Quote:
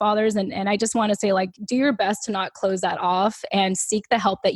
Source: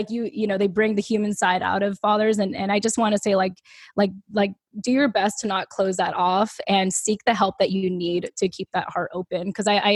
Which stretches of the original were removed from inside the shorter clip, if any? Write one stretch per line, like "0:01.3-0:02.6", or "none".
0:03.6-0:04.7